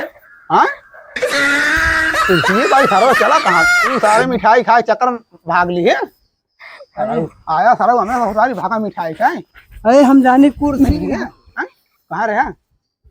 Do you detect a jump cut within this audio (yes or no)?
no